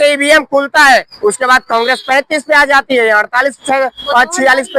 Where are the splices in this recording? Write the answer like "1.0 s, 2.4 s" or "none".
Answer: none